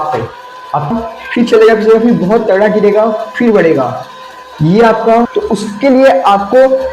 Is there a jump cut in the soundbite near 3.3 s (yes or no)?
no